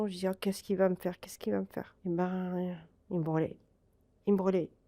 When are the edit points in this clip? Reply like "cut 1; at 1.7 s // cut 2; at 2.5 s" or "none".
cut 1; at 1.9 s

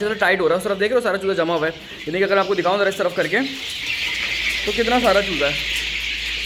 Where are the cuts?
none

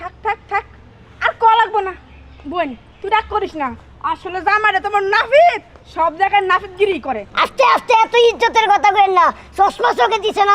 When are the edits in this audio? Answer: cut 1; at 7.3 s

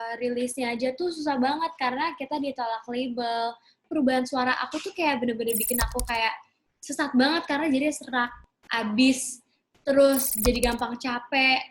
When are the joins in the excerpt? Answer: cut 1; at 3.8 s

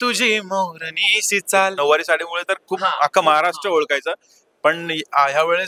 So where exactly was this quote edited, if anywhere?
cut 1; at 1.7 s

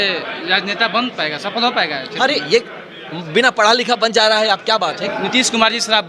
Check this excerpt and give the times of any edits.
cut 1; at 4.9 s

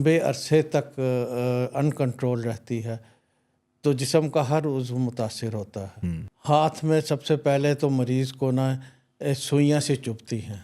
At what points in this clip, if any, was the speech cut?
cut 1; at 6.3 s

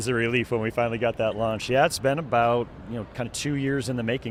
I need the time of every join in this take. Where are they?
none

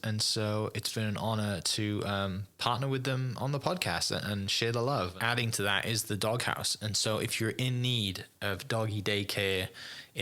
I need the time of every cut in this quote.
cut 1; at 5.1 s

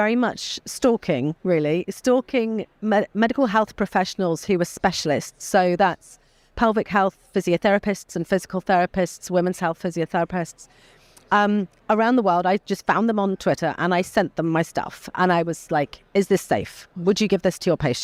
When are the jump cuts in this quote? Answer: none

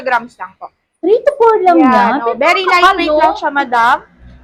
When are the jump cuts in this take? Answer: none

